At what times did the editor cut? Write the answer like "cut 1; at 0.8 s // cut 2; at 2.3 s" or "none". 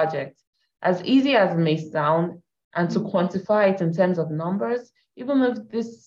none